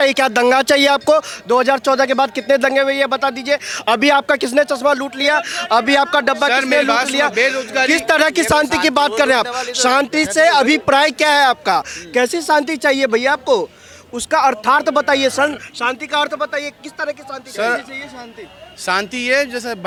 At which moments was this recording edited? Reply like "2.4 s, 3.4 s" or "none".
none